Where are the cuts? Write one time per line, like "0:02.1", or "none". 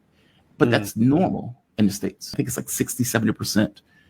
0:02.2